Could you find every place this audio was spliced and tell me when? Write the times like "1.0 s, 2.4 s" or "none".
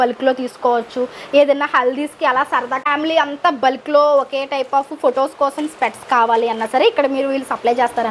2.8 s

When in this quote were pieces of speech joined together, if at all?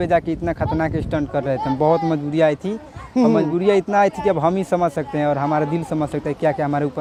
none

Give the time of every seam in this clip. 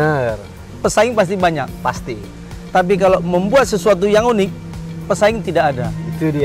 none

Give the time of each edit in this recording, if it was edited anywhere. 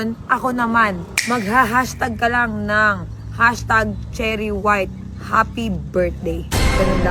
1.1 s

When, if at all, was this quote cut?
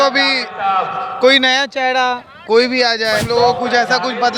3.2 s

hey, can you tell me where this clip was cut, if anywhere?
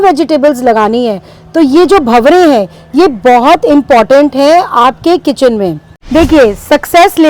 5.9 s

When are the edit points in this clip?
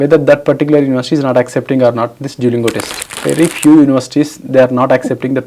3.0 s

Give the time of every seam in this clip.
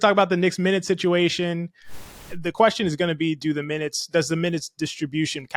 2.0 s

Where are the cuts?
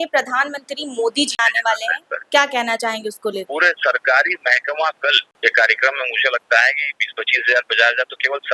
1.3 s, 3.5 s, 5.3 s

